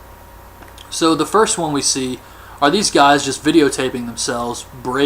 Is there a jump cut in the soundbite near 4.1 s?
yes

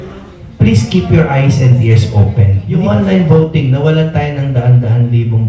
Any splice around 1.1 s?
no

